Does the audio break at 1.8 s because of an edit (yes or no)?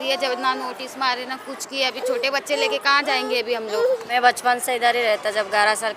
no